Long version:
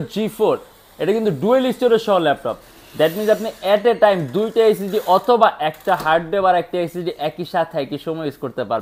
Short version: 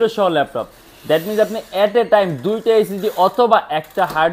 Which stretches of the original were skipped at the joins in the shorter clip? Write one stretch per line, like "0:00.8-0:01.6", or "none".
none